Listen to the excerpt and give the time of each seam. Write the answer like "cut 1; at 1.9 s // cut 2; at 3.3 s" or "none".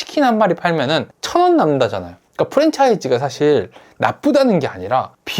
cut 1; at 2.1 s

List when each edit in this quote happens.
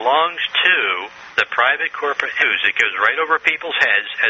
none

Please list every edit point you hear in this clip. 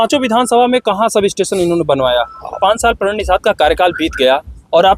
cut 1; at 2.6 s

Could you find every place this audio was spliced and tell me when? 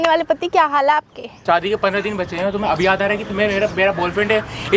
cut 1; at 1.4 s

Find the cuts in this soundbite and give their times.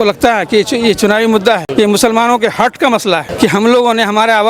cut 1; at 1.7 s // cut 2; at 3.3 s

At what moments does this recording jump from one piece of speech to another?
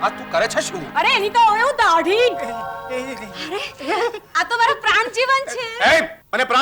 none

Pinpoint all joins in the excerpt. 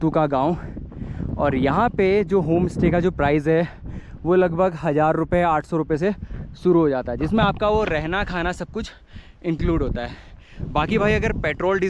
none

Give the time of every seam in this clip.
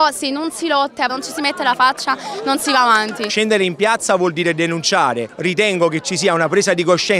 cut 1; at 1.1 s // cut 2; at 3.3 s // cut 3; at 5.2 s

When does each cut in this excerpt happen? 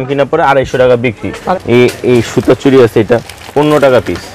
cut 1; at 1.4 s

